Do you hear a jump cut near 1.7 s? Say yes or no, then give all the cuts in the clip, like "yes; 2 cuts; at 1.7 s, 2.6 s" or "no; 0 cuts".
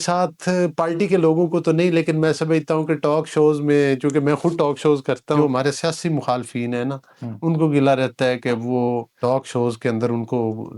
no; 2 cuts; at 5.4 s, 9.1 s